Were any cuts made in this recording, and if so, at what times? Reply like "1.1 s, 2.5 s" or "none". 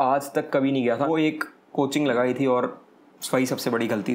1.1 s